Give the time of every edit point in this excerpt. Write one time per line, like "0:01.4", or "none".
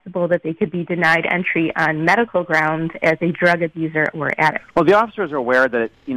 0:04.6